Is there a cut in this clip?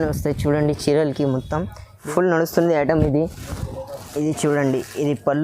yes; 1 cut; at 2.0 s

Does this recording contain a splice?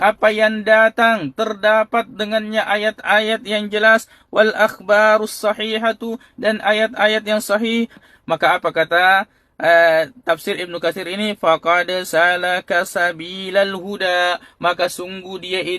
yes; 1 cut; at 8.0 s

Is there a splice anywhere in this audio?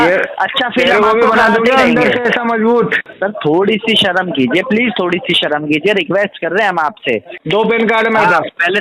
yes; 2 cuts; at 3.1 s, 7.3 s

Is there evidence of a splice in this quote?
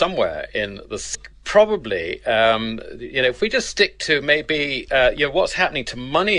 no; 0 cuts

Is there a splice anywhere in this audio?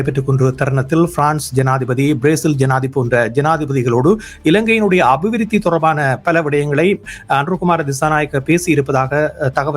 no; 0 cuts

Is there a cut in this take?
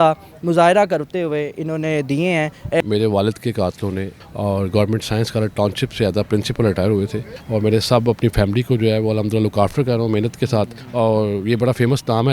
yes; 4 cuts; at 2.8 s, 4.1 s, 7.3 s, 10.8 s

